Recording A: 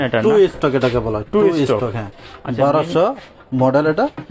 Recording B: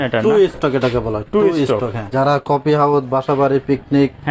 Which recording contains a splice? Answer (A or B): B